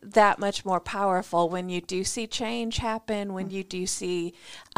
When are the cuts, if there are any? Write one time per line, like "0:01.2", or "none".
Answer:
none

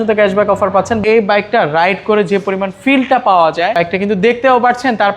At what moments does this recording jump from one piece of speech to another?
0:01.0
0:03.8

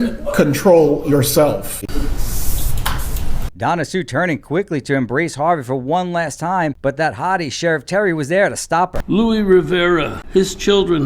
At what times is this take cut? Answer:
0:02.0
0:06.8
0:09.0
0:10.2

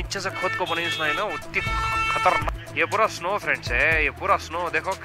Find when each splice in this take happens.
0:02.5

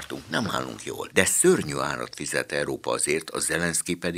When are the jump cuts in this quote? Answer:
0:01.0

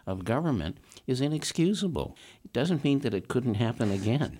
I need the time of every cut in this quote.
0:02.2

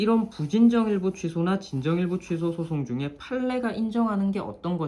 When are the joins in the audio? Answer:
none

